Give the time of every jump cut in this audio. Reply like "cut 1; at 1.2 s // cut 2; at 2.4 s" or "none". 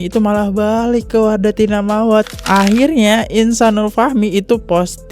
cut 1; at 2.3 s